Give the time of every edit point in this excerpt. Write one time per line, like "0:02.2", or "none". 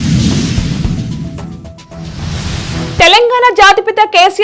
none